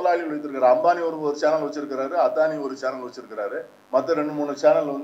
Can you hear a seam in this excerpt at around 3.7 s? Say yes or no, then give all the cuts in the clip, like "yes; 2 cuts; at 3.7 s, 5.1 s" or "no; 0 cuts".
yes; 1 cut; at 3.7 s